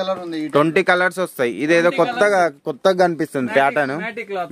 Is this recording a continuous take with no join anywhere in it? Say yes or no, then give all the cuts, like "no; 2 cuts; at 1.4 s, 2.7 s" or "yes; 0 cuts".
yes; 0 cuts